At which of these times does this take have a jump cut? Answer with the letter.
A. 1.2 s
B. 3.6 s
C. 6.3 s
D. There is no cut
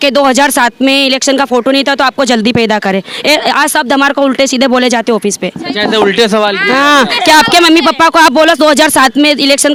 D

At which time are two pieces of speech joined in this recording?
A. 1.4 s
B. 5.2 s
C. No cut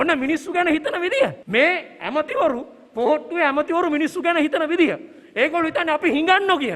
A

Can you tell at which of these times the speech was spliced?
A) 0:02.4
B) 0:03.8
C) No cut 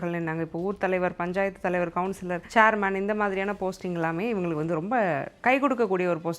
A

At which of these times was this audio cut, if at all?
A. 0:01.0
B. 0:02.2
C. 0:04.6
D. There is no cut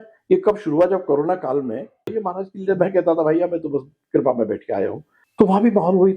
B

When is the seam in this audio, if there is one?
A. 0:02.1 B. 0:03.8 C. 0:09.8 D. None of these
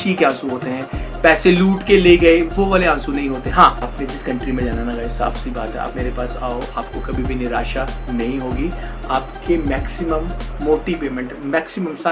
B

